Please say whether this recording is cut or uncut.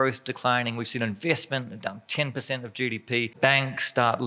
cut